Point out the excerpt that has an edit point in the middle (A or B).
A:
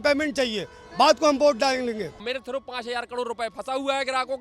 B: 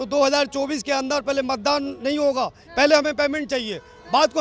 A